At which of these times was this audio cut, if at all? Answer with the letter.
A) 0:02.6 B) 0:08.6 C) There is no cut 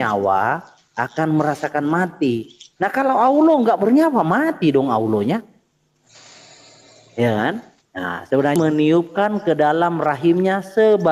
B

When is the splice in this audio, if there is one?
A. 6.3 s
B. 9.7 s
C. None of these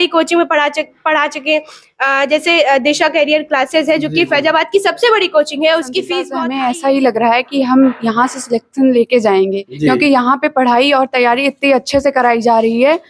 A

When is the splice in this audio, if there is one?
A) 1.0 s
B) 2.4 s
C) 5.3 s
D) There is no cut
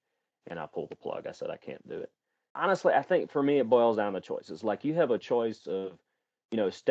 B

